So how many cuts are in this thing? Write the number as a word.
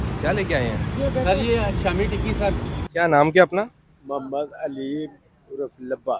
one